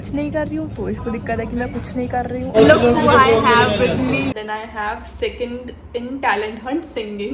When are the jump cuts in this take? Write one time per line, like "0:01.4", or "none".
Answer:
0:02.5
0:04.3